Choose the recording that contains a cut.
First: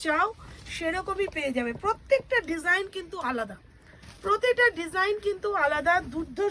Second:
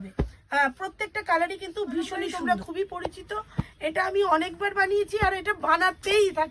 second; 1 cut; at 2.4 s

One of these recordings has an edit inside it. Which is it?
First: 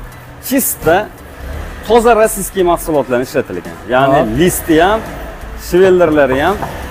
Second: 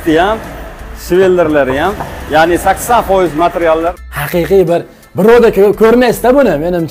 second; 1 cut; at 4.0 s

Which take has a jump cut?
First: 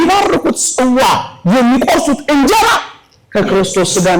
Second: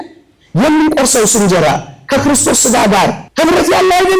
second; 1 cut; at 3.2 s

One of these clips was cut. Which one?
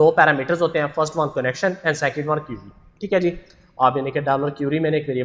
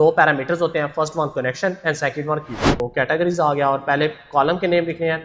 second; 1 cut; at 2.8 s

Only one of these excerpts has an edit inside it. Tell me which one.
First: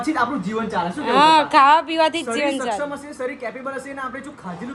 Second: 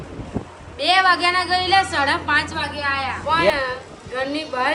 second; 1 cut; at 3.5 s

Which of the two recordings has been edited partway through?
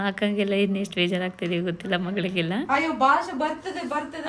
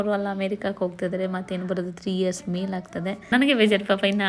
second; 1 cut; at 3.3 s

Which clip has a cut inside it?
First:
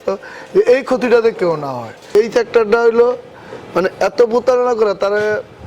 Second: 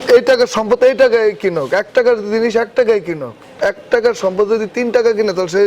first; 1 cut; at 2.1 s

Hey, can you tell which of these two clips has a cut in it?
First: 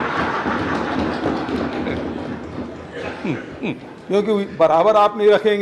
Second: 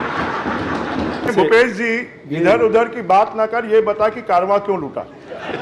second; 1 cut; at 1.3 s

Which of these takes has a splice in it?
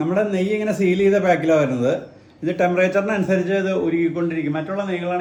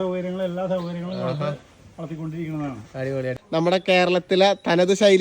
second; 1 cut; at 3.4 s

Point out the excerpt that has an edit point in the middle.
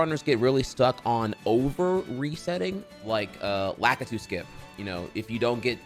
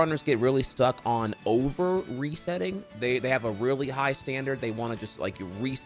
first; 1 cut; at 2.9 s

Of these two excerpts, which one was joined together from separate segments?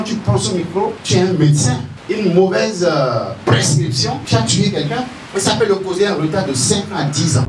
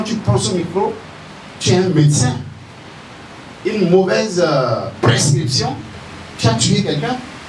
first; 4 cuts; at 1.0 s, 1.9 s, 4.2 s, 5.2 s

